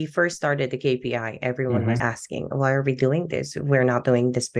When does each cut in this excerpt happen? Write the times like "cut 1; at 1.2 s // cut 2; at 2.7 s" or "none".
cut 1; at 2.0 s